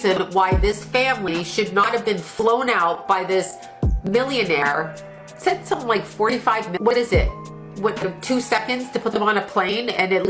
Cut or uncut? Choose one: cut